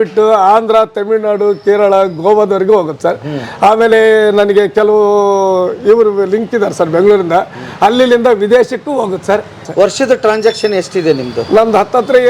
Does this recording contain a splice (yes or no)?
yes